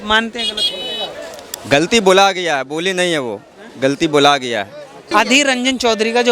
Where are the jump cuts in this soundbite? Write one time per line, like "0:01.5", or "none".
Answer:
0:04.9